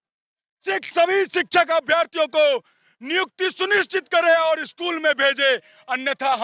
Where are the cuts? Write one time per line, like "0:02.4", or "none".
none